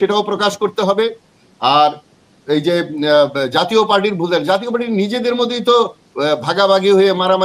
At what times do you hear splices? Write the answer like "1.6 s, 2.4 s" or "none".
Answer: none

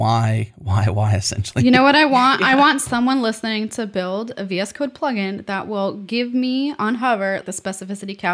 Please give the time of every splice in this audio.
7.4 s

